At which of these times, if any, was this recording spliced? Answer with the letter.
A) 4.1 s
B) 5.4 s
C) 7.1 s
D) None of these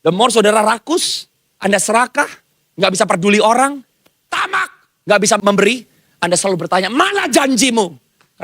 B